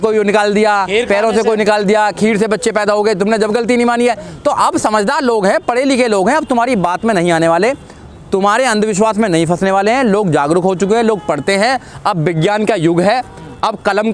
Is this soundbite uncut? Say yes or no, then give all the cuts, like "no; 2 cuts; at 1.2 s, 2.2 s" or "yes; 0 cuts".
yes; 0 cuts